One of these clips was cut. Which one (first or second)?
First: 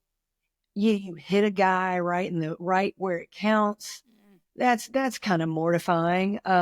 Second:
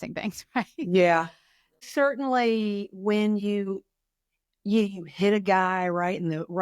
second